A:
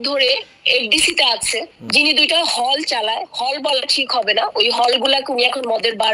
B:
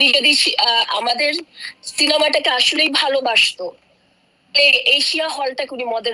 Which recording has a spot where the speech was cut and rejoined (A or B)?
A